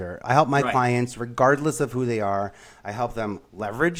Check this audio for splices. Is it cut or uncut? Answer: uncut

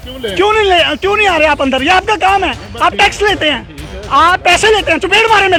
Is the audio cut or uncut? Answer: uncut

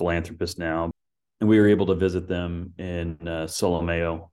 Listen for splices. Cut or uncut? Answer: cut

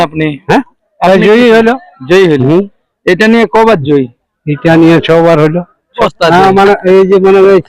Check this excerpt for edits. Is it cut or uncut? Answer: cut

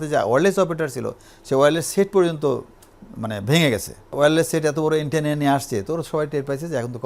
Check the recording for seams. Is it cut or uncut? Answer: cut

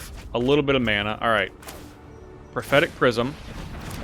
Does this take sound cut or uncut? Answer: uncut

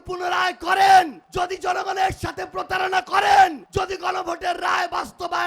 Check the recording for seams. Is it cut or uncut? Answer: cut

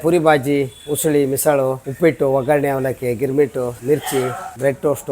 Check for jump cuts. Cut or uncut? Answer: uncut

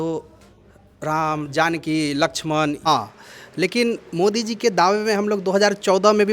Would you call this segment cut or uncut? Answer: cut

